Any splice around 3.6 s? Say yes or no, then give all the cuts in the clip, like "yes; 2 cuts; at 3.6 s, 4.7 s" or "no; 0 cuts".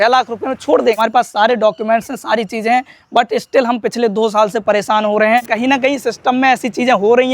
no; 2 cuts; at 1.0 s, 5.4 s